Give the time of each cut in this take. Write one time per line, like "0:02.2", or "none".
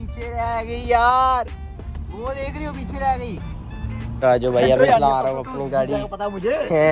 0:04.1